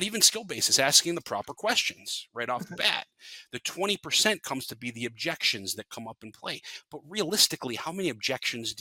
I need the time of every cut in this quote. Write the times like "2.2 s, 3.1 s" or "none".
none